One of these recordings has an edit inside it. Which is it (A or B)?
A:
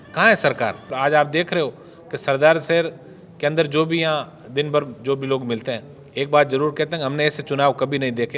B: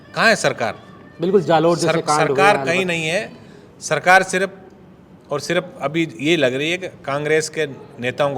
A